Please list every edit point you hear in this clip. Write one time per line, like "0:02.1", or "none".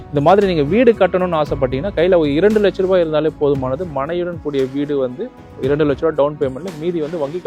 none